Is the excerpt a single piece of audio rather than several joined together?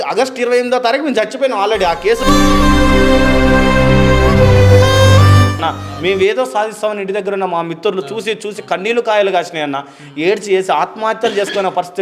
no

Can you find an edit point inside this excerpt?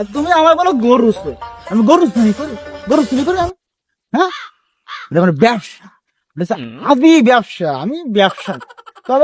no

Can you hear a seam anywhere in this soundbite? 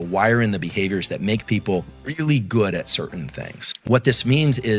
no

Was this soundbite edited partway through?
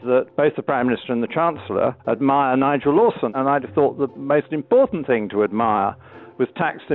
yes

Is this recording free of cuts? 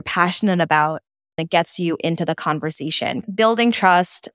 no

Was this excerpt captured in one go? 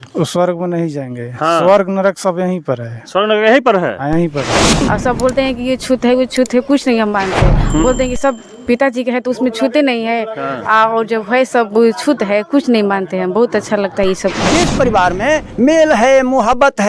no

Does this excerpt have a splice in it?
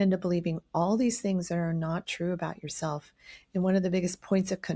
no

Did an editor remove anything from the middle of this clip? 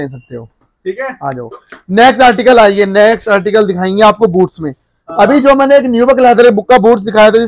no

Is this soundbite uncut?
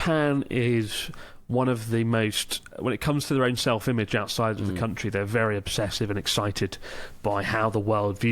no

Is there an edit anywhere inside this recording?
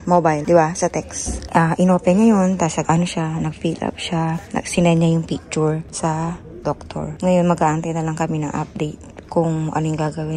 no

